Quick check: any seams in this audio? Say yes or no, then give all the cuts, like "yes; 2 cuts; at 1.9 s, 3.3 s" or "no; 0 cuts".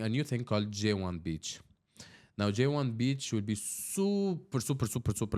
no; 0 cuts